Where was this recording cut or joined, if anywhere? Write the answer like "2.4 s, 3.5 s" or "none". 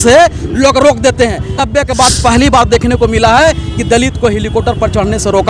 1.5 s